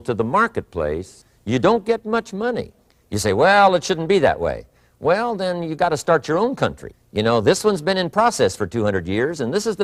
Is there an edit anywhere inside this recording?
no; 0 cuts

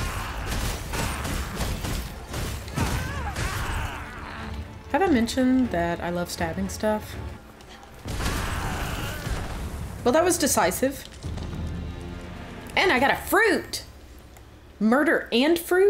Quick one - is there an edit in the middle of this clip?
no; 0 cuts

